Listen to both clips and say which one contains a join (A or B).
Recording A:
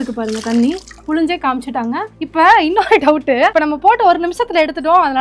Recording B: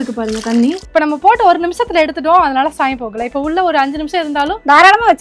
B